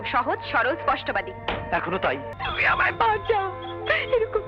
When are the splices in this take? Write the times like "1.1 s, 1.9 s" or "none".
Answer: 2.3 s